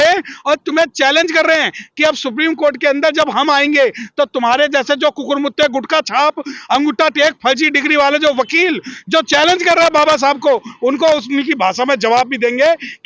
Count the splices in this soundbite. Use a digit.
0